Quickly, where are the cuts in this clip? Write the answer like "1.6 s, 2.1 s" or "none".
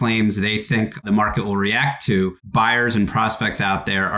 1.0 s, 2.4 s